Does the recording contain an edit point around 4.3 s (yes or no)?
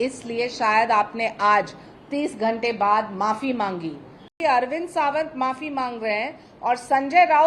yes